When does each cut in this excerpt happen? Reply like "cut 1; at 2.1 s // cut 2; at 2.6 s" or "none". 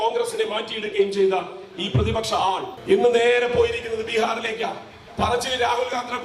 cut 1; at 2.7 s

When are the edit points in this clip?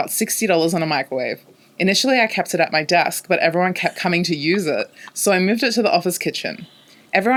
none

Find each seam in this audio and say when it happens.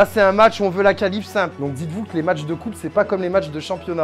cut 1; at 1.5 s

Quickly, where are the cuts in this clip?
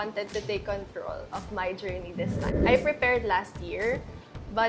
cut 1; at 2.5 s

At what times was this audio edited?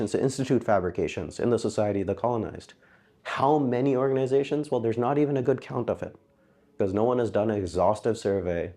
none

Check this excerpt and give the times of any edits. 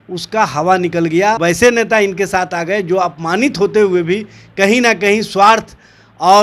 cut 1; at 1.4 s

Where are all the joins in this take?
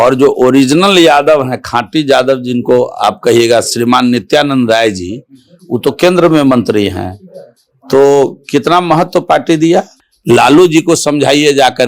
cut 1; at 10.0 s

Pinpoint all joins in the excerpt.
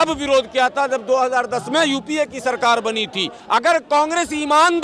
cut 1; at 3.4 s

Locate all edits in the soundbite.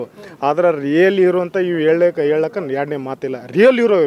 none

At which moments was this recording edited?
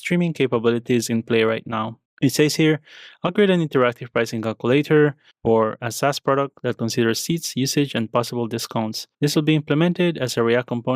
cut 1; at 5.3 s

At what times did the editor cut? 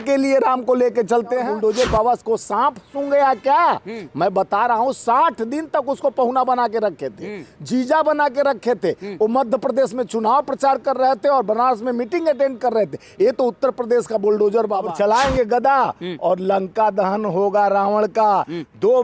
cut 1; at 1.4 s // cut 2; at 14.9 s

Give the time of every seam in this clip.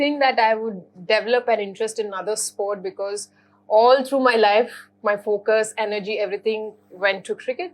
none

